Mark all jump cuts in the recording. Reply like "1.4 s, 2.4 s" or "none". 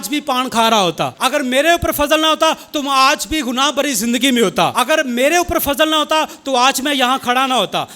1.1 s, 4.7 s

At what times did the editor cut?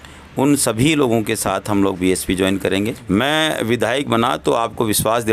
3.1 s

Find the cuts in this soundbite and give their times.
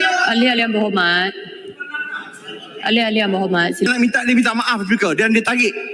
3.9 s

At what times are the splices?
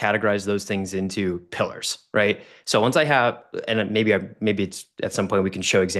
none

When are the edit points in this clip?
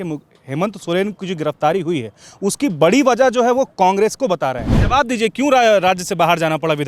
4.7 s

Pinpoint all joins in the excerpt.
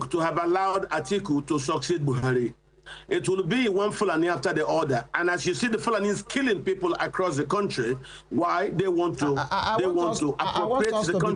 none

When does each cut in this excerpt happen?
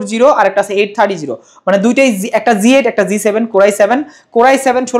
none

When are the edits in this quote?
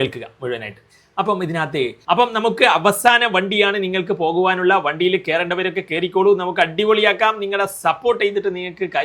2.0 s

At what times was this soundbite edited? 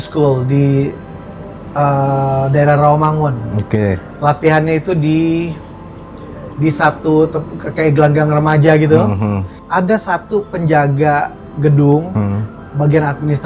9.6 s

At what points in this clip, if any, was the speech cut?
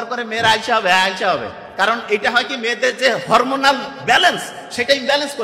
none

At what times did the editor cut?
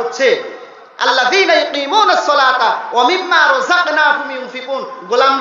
none

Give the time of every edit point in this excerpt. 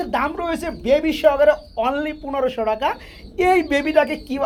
none

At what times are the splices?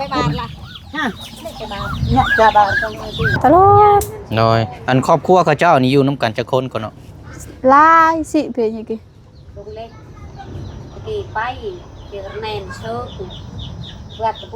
3.4 s

